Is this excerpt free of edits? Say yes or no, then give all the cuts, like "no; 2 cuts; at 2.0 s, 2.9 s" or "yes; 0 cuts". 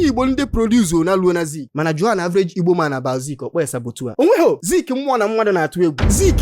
no; 2 cuts; at 1.6 s, 4.1 s